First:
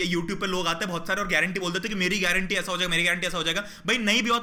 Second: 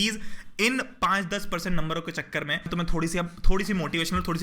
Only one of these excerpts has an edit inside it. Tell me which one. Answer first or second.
second